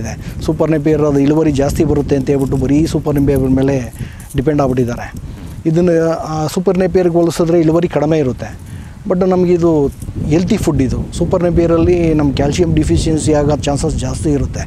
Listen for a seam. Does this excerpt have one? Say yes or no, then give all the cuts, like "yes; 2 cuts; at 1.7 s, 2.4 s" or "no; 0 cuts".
yes; 1 cut; at 10.1 s